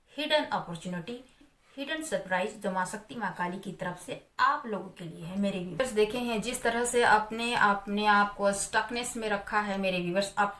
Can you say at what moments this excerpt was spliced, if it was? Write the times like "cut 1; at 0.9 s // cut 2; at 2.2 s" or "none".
cut 1; at 5.8 s